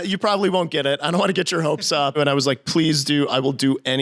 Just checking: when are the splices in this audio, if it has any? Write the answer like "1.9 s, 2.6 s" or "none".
2.2 s